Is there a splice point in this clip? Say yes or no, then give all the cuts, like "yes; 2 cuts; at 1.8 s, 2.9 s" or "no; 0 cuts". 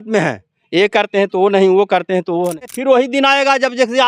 yes; 1 cut; at 2.6 s